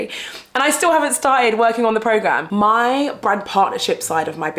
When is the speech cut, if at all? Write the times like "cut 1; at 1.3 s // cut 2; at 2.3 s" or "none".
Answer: cut 1; at 2.4 s